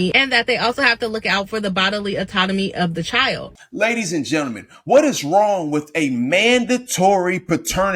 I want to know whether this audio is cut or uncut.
cut